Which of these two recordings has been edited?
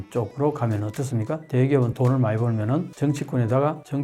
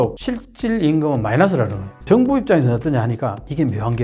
second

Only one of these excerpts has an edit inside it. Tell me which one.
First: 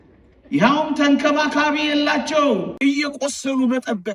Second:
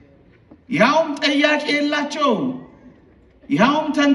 first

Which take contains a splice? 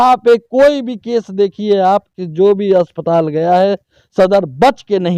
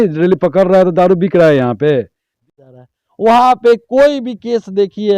second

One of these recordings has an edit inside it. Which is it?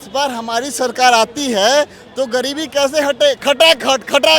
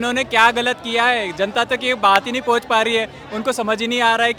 first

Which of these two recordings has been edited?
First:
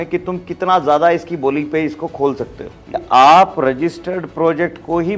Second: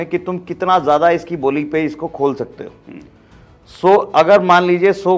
first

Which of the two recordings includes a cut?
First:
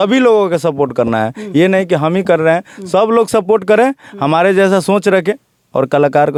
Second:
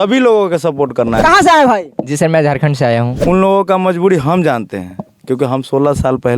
second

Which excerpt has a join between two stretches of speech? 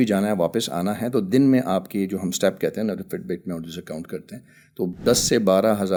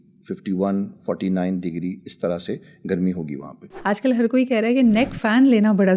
second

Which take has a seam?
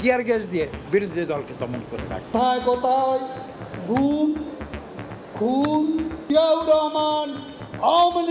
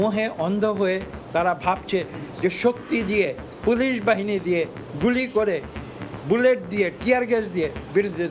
first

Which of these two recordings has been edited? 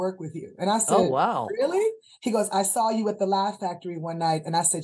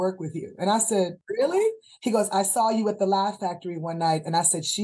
second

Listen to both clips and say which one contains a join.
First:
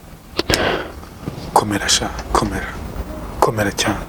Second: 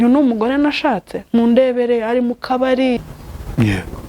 second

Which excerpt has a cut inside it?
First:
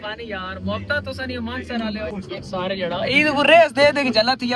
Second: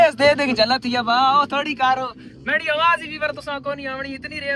first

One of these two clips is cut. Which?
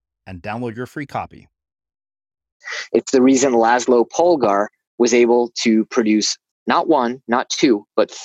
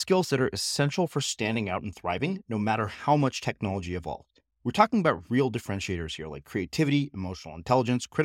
first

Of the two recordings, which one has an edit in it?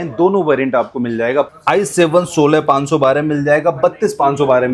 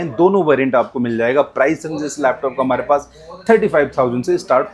first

